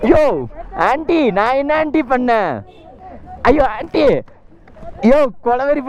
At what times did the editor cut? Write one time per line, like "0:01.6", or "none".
none